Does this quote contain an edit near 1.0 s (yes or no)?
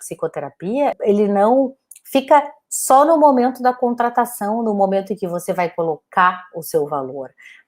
yes